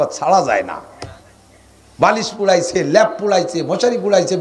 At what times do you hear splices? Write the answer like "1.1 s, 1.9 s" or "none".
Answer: none

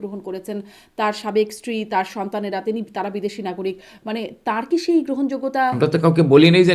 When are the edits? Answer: 5.8 s

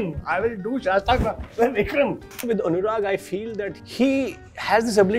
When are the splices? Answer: 2.4 s, 3.8 s

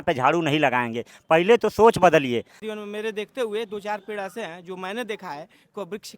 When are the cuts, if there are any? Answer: 2.6 s

